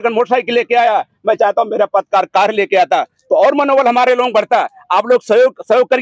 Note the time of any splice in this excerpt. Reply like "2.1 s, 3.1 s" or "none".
none